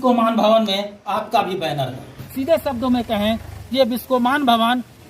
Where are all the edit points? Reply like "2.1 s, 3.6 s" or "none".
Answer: 2.2 s

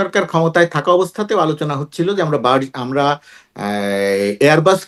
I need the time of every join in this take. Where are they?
none

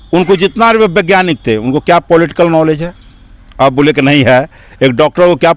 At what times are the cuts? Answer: none

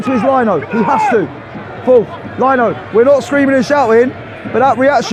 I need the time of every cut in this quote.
none

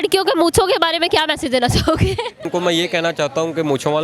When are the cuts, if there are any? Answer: 2.5 s

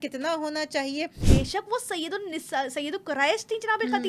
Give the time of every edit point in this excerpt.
1.3 s

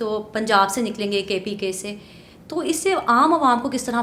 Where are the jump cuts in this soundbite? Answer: none

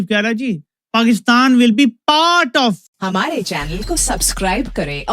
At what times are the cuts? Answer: 3.0 s

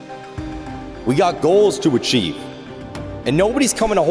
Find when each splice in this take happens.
1.0 s

